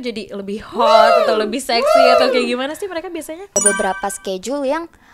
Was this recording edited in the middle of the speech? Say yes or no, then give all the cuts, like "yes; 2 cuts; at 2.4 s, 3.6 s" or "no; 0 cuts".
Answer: yes; 1 cut; at 3.5 s